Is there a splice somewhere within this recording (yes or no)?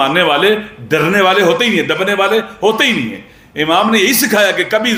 no